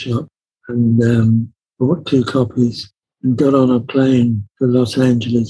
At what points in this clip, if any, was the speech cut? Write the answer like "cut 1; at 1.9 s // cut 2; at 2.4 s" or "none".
cut 1; at 4.5 s